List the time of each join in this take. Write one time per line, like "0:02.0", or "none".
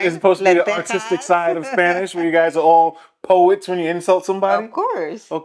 none